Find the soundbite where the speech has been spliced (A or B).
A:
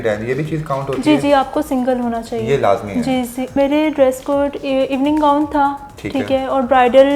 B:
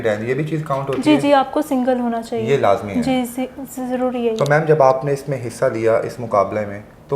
A